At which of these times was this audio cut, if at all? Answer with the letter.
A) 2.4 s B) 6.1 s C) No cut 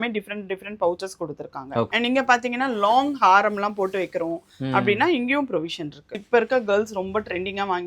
B